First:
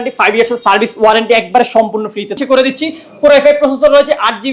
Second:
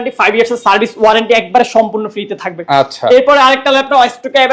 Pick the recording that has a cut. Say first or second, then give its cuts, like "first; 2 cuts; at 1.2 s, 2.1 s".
first; 1 cut; at 2.4 s